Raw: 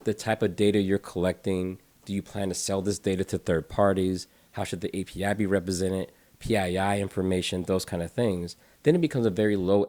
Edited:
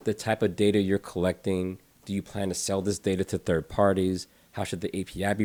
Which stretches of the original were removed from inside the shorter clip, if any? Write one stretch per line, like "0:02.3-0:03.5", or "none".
none

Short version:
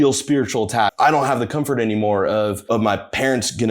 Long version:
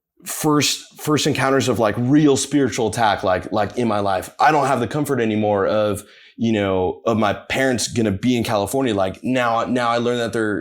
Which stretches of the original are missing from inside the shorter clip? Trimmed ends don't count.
0:03.2-0:04.3
0:06.0-0:07.0

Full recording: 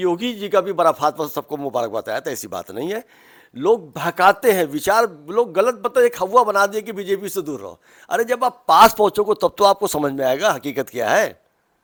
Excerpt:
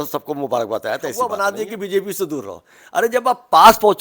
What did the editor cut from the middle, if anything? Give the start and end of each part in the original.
0:02.5-0:06.5

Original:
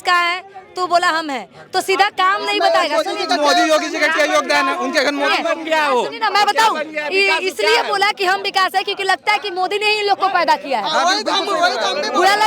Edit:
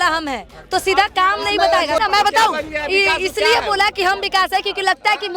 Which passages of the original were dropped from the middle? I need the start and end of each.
0:03.0-0:06.2

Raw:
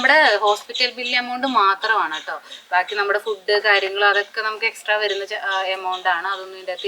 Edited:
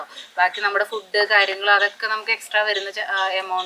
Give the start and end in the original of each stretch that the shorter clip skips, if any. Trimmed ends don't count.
none

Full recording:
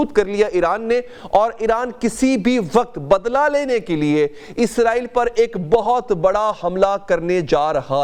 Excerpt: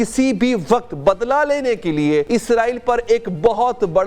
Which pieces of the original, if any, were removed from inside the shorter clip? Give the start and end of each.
0:04.3-0:04.5

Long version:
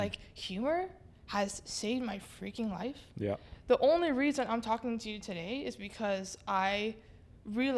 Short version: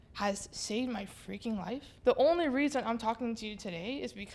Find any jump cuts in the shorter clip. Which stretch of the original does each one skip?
0:03.0-0:03.5

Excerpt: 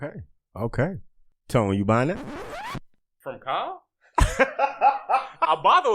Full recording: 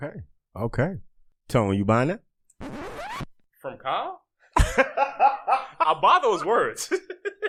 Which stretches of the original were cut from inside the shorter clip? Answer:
0:02.7-0:03.1

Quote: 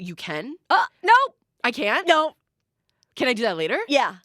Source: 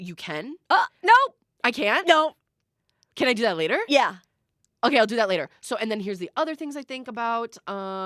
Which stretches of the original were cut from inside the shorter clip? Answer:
none

